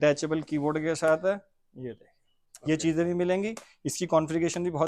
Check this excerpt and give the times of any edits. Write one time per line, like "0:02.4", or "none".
none